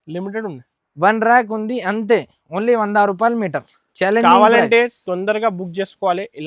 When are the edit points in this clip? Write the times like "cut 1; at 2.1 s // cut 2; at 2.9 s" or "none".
none